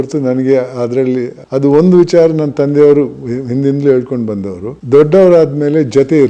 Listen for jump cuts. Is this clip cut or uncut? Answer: cut